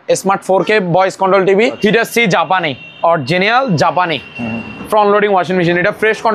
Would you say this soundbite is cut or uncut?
cut